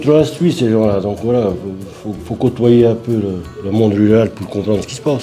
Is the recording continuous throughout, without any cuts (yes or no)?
yes